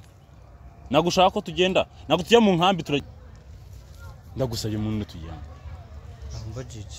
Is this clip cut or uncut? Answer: cut